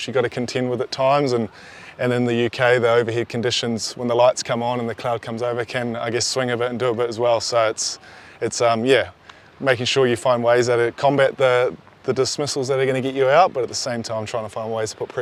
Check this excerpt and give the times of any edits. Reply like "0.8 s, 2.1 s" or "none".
none

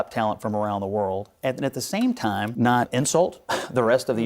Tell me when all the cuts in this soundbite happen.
2.9 s

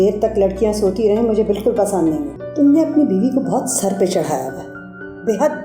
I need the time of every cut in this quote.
2.4 s

